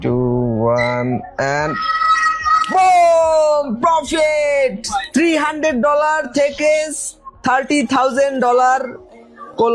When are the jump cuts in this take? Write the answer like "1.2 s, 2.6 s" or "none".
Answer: none